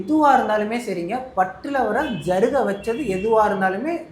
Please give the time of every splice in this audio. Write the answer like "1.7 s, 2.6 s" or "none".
none